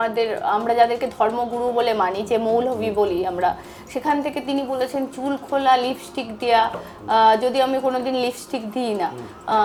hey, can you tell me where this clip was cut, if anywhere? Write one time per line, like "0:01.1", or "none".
none

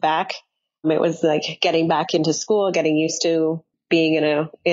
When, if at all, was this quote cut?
0:03.7

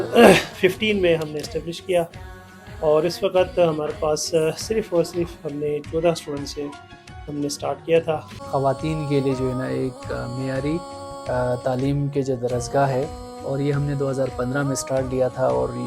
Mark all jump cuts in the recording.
0:08.3

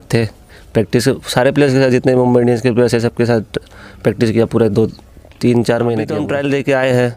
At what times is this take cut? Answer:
0:06.3

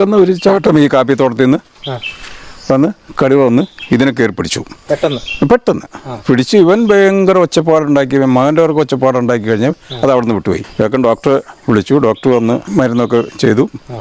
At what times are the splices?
0:10.7
0:12.7

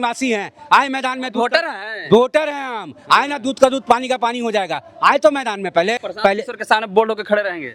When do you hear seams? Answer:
0:06.1

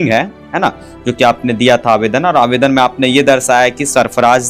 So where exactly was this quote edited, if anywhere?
none

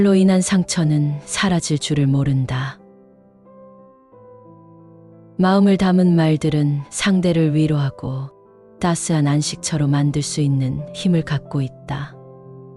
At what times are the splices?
none

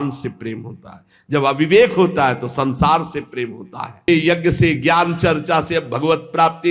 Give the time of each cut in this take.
0:04.1

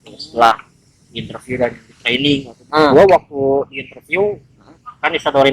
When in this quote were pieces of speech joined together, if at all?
0:02.5

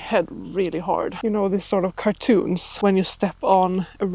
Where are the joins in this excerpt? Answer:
0:01.1
0:02.7

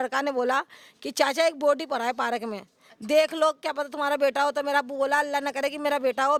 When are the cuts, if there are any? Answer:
none

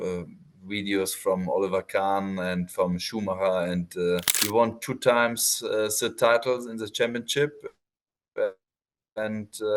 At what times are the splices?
0:04.3

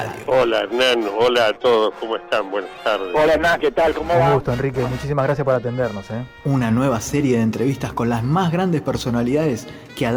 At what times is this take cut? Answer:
none

